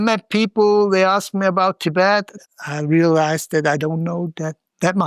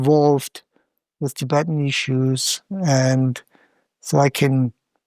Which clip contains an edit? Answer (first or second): first